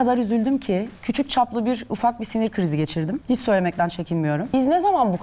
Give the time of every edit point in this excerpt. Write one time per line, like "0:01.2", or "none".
0:01.0
0:03.2
0:04.5